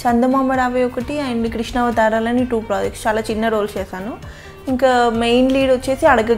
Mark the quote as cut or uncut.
uncut